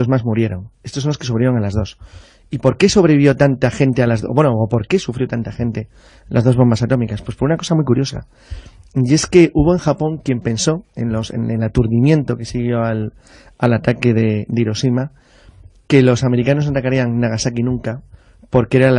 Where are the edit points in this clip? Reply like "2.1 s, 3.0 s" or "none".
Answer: 7.2 s